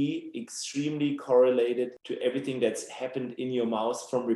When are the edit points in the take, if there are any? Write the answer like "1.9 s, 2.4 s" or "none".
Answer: 2.0 s